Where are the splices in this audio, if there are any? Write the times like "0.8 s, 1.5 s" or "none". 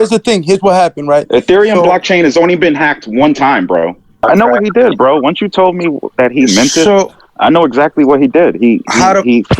4.2 s